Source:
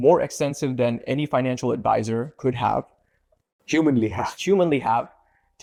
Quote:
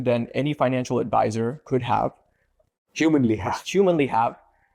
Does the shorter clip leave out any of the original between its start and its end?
no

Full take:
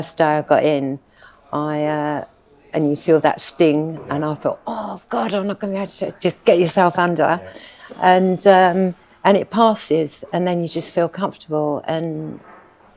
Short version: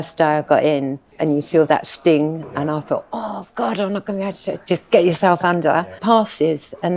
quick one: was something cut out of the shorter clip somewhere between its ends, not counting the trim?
yes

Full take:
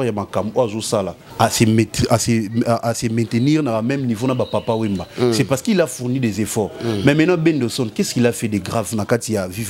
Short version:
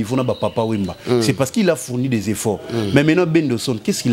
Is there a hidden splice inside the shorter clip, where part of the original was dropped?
no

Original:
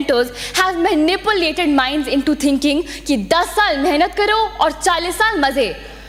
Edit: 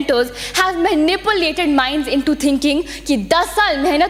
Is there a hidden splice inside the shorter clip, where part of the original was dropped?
no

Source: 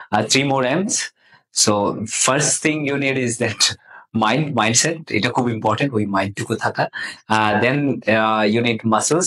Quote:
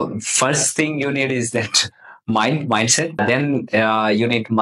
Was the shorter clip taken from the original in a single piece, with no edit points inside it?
no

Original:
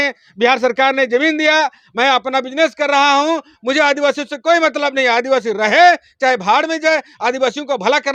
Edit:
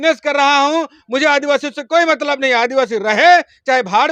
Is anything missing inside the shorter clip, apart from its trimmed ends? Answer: no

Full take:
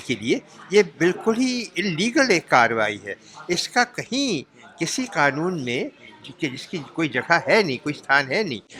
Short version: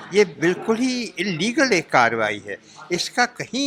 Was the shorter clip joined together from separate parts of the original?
no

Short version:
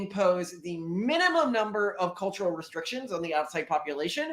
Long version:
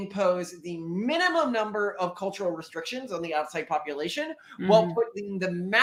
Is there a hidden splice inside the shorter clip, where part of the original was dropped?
no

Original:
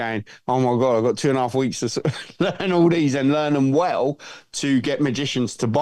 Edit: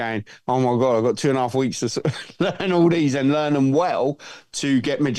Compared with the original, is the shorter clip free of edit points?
yes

